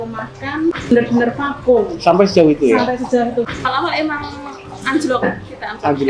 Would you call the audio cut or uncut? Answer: cut